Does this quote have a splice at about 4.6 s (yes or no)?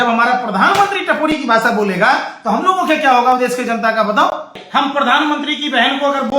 yes